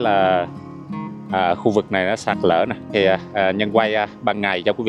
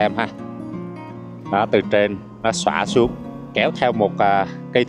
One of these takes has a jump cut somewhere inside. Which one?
first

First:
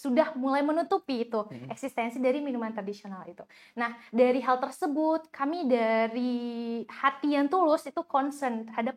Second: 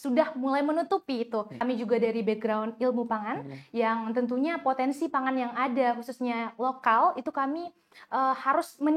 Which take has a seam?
second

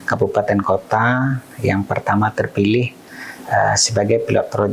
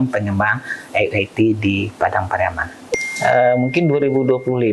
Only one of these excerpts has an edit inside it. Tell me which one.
second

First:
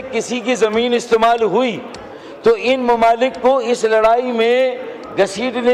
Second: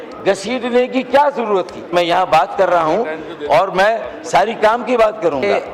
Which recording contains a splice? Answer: second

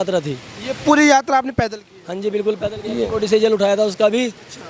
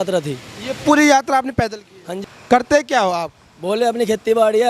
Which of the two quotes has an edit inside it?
second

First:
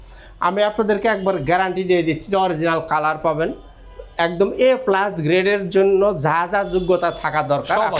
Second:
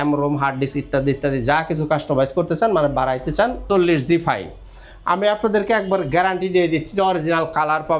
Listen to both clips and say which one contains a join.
second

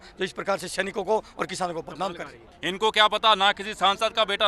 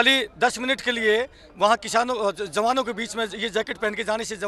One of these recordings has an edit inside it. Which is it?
first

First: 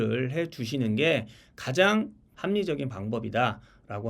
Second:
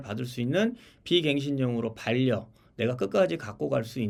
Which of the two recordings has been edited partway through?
first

